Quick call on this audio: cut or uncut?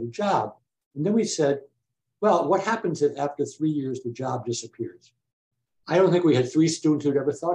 uncut